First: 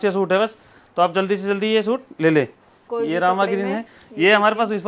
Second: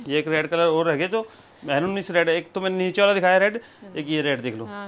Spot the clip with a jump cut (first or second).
first